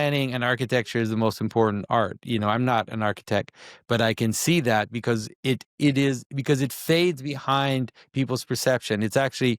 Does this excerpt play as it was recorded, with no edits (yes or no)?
yes